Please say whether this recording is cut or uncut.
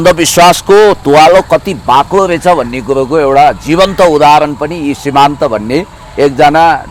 uncut